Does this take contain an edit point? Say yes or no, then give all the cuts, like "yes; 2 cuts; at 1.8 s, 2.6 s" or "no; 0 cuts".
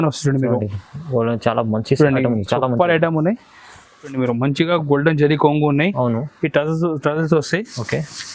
yes; 1 cut; at 4.1 s